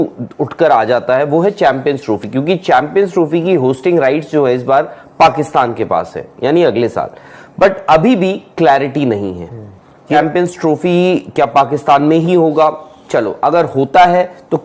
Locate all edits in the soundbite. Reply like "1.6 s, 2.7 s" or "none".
10.1 s